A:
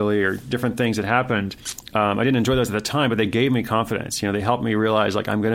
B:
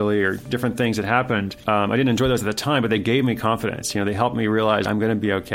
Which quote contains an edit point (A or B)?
B